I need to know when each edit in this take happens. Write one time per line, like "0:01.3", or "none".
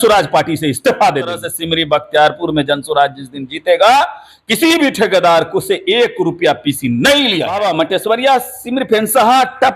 0:01.5
0:07.6